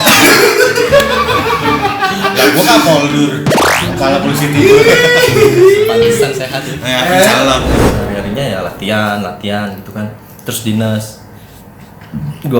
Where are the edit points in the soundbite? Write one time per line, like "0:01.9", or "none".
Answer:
0:07.7